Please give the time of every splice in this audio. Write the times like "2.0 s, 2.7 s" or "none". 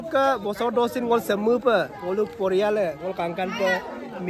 none